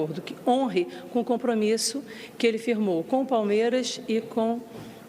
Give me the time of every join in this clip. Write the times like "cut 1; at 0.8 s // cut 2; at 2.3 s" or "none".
none